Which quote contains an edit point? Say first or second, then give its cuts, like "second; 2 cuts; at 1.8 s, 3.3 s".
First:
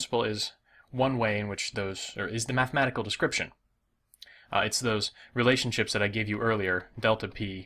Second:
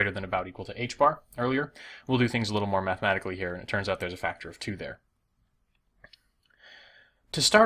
second; 1 cut; at 5.3 s